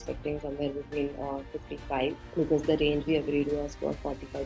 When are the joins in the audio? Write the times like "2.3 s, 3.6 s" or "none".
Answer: 2.2 s